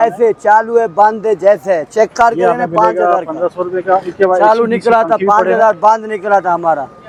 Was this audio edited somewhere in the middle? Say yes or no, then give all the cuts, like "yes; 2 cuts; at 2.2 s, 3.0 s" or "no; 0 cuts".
no; 0 cuts